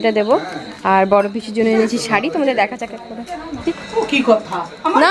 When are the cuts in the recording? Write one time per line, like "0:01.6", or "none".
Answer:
0:03.7